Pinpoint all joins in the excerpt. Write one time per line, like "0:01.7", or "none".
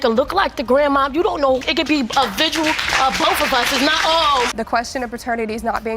0:01.6
0:04.5

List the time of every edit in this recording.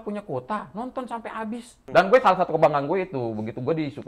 0:01.7

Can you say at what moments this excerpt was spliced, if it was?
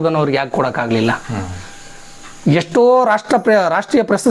none

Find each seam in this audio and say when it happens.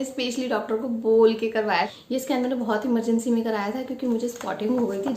0:01.9

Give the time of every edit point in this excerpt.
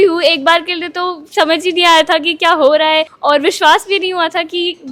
none

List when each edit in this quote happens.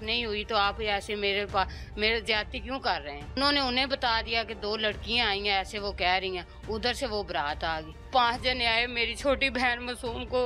0:03.4
0:08.1

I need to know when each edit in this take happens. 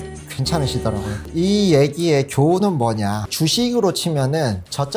0:03.2

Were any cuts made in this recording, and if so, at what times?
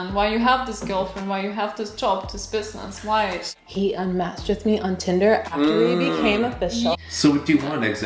0:03.4
0:07.0

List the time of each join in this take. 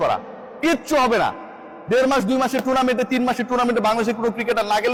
none

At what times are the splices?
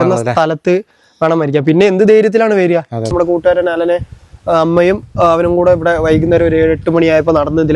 0:03.1

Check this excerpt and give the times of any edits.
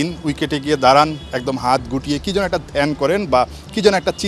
none

